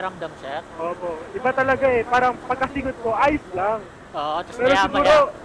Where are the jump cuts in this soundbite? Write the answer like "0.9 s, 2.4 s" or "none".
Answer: none